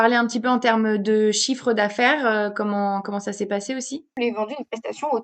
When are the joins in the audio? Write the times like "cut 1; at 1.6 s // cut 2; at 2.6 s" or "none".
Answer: cut 1; at 4.0 s